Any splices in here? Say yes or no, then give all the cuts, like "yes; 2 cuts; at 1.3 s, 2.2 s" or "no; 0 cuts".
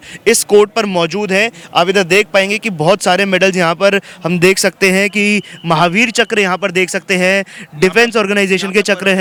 no; 0 cuts